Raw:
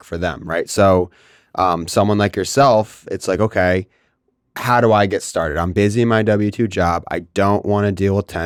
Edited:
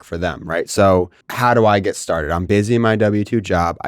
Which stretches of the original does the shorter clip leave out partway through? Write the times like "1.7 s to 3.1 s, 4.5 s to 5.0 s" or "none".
1.2 s to 4.5 s